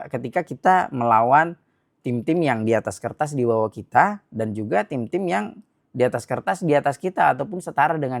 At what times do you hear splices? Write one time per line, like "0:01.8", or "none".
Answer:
none